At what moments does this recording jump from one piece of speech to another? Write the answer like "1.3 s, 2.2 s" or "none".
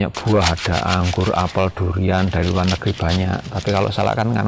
none